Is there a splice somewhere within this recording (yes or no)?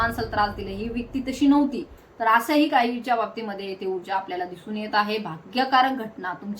no